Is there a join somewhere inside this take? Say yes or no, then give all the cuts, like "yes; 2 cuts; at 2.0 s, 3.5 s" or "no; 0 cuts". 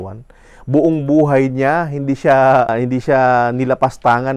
yes; 1 cut; at 2.7 s